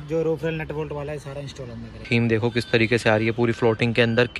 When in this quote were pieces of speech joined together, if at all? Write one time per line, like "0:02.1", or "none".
0:02.0